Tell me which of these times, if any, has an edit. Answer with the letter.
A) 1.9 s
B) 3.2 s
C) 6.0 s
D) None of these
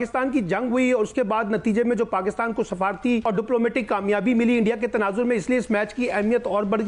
B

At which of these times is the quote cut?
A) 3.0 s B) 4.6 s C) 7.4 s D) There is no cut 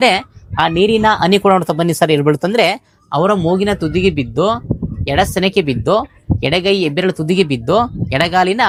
D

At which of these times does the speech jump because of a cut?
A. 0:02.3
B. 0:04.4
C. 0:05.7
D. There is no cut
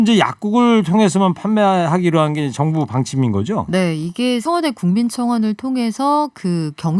B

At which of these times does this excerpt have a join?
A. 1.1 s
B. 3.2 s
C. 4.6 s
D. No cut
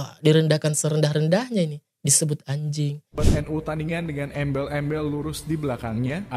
B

